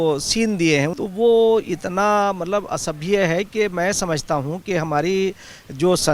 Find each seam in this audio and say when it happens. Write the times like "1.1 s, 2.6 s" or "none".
1.0 s

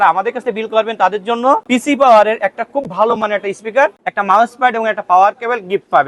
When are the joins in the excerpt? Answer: 1.6 s, 4.0 s

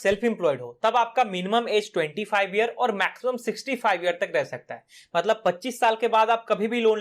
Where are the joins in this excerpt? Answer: none

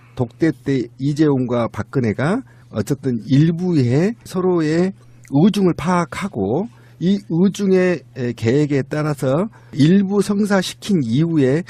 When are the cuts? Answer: 1.3 s

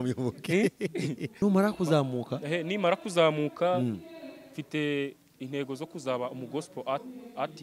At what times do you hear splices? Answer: 1.3 s

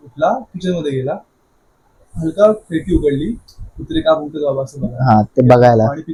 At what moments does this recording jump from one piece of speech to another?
none

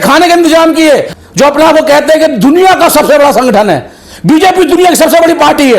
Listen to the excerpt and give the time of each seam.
1.1 s

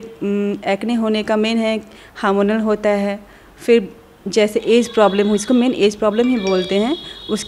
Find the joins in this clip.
none

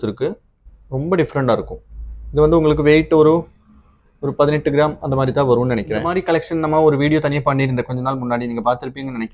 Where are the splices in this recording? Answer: 6.2 s

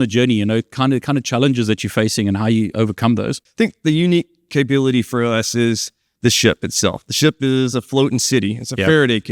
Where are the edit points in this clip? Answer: 3.4 s

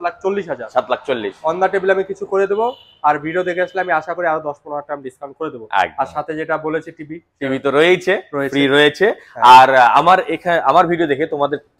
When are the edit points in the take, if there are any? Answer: none

